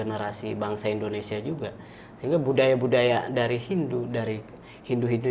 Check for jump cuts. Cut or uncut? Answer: uncut